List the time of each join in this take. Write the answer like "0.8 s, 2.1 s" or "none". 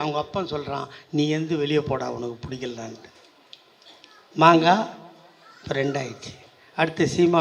none